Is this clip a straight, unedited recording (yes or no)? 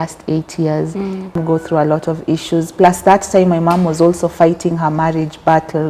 no